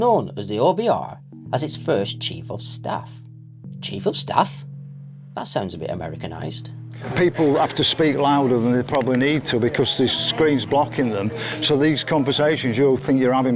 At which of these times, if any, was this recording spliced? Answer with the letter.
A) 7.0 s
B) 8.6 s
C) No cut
A